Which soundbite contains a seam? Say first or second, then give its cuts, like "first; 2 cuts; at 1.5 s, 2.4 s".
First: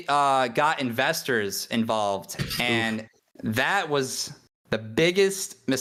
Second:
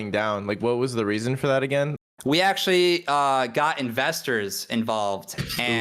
second; 1 cut; at 1.9 s